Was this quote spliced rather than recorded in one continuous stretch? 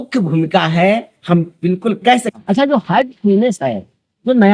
yes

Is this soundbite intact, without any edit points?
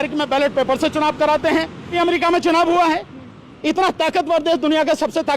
no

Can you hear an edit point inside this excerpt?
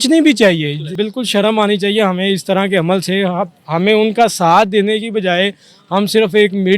yes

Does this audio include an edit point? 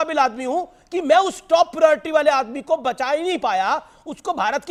no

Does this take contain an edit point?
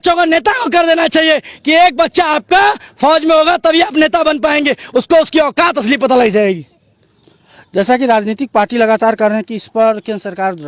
no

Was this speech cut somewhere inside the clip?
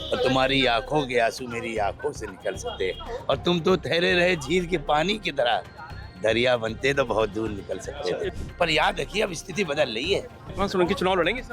yes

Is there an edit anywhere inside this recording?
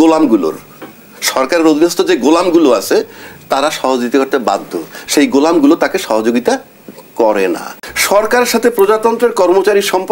yes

